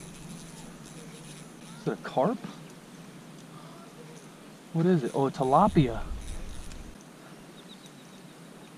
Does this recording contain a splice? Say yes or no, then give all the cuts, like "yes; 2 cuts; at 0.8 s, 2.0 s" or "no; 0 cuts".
yes; 2 cuts; at 1.6 s, 6.9 s